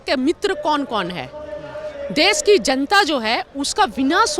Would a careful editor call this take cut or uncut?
uncut